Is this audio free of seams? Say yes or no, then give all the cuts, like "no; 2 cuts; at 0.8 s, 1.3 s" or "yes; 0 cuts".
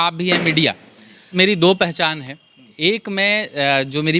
no; 1 cut; at 1.2 s